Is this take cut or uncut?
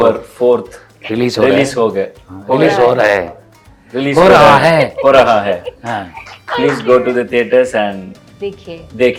uncut